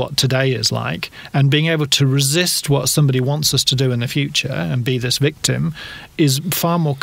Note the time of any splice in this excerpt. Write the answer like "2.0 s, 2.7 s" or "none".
6.1 s